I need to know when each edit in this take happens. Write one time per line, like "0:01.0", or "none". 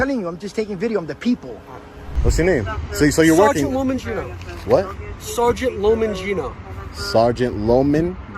0:02.0